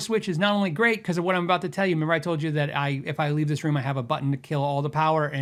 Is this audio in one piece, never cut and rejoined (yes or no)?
yes